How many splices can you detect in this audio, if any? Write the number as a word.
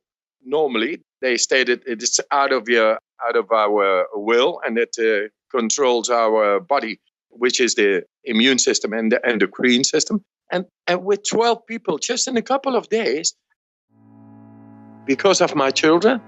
zero